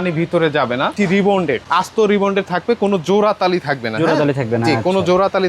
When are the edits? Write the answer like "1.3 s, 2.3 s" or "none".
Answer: 0.9 s